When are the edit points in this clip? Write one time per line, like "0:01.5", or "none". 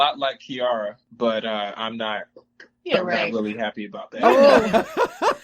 0:01.0